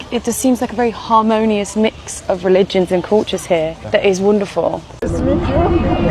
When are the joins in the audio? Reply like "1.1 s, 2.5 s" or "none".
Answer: none